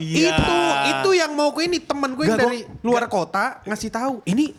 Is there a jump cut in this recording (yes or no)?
no